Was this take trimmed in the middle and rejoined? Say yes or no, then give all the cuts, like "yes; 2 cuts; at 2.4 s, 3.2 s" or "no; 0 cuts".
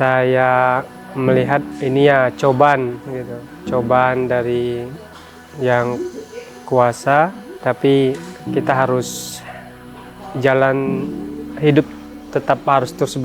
yes; 3 cuts; at 1.0 s, 1.7 s, 7.5 s